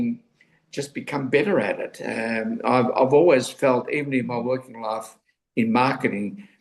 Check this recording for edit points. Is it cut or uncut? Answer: uncut